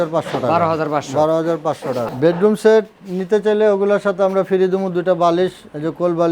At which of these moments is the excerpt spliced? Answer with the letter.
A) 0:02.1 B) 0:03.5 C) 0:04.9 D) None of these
A